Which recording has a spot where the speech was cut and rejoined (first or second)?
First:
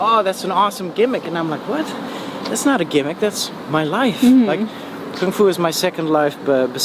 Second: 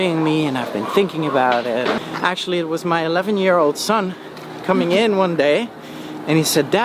second